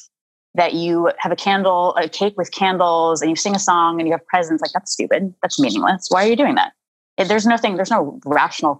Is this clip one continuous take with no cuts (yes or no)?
yes